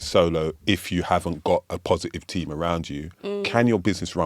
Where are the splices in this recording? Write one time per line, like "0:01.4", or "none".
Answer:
0:03.1

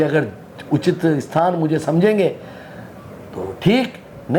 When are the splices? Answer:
none

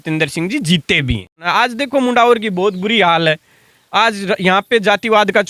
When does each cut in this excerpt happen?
0:01.4

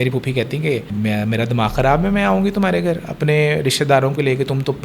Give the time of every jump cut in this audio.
0:00.9

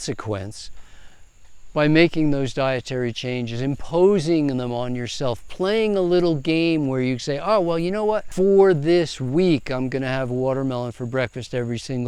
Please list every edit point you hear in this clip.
none

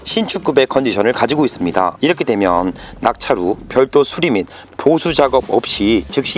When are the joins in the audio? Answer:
none

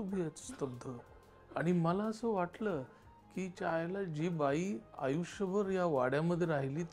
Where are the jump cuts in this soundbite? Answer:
none

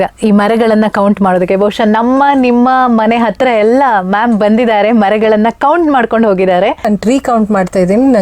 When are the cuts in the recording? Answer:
0:06.8

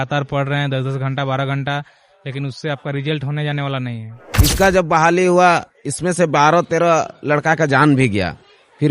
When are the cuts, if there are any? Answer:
0:04.2

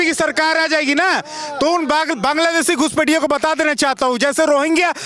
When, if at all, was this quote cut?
none

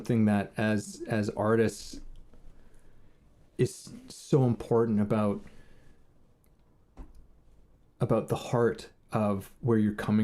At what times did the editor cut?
0:03.2

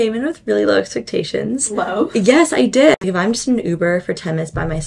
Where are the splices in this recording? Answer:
0:03.0

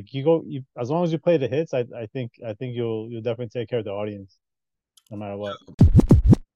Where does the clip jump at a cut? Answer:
0:05.6

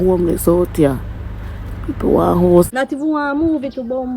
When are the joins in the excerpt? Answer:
0:02.7

